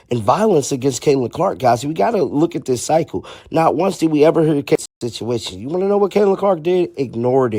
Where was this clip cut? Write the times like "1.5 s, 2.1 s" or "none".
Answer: 4.8 s